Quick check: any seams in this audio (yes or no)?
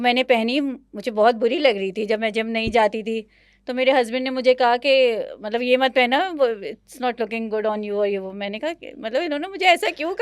no